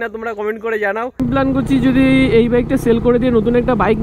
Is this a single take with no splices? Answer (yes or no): no